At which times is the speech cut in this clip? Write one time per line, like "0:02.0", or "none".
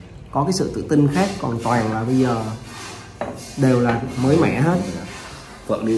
none

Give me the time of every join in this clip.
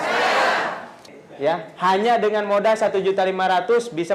0:01.1

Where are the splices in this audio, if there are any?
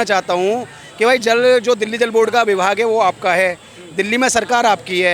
none

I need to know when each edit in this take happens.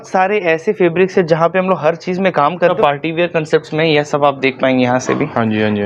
0:02.7

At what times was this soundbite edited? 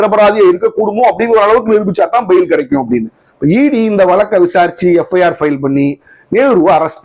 0:03.2

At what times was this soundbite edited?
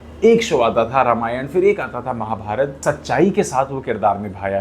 0:02.8

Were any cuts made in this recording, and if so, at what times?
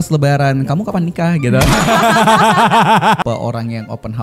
0:03.2

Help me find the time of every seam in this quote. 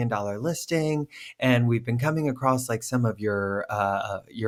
none

